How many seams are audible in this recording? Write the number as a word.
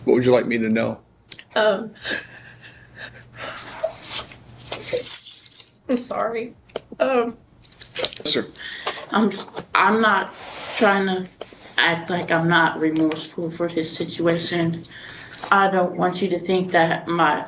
one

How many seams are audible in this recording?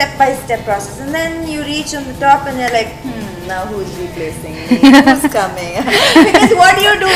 zero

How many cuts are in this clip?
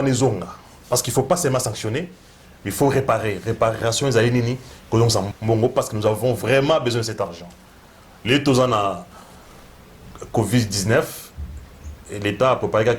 one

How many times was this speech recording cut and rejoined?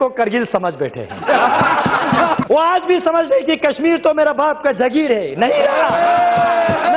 two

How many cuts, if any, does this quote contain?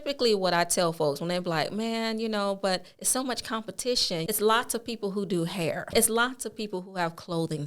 two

